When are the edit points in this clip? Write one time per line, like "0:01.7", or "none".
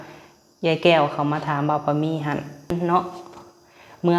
0:02.7